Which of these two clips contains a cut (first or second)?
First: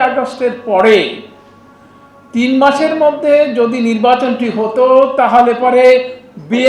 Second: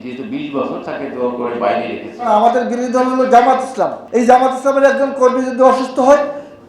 second